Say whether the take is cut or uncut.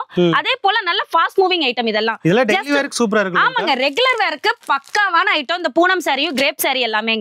uncut